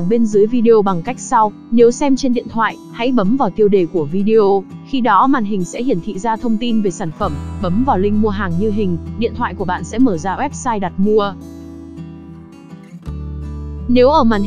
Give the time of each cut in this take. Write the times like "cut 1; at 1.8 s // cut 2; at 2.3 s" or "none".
none